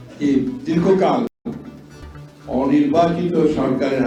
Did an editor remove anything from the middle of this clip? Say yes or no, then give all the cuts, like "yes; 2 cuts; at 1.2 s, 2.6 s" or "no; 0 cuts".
no; 0 cuts